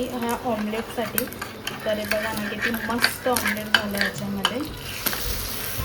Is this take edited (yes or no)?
no